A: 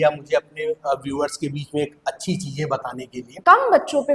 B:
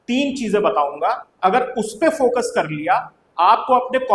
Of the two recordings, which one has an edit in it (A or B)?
A